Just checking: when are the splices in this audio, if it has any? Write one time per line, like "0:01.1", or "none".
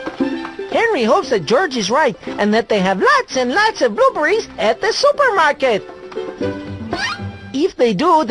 none